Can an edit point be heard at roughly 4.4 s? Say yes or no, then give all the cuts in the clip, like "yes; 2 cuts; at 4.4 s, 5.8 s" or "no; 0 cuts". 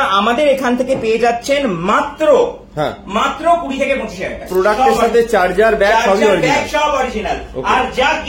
yes; 1 cut; at 4.4 s